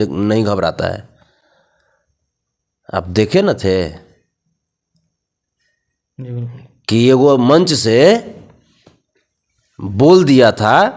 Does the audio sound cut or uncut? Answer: uncut